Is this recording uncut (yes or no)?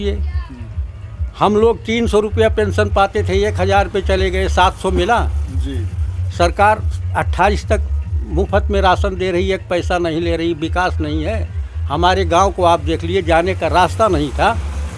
yes